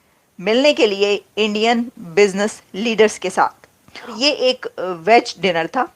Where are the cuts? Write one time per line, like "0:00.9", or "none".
0:04.2